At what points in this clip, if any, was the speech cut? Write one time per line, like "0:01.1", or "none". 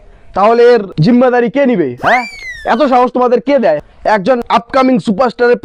0:00.9
0:04.4